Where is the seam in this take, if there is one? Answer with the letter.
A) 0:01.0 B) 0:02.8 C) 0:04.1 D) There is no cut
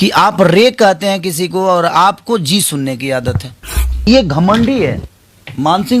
C